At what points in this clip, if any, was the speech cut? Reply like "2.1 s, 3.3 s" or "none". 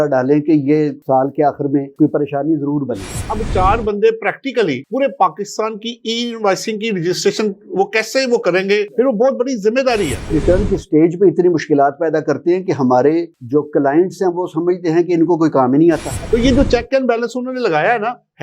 3.2 s, 10.3 s, 16.1 s